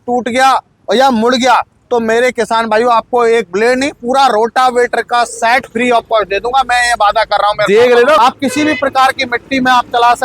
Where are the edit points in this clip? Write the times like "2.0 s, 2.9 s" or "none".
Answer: 8.2 s